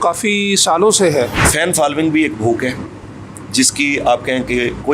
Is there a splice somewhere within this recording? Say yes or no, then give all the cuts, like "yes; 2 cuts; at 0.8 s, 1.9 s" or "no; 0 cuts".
yes; 1 cut; at 1.5 s